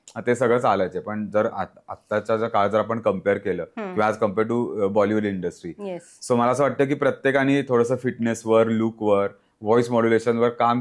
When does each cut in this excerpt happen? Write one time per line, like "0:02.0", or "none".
none